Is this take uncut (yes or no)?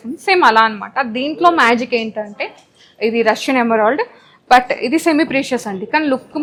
yes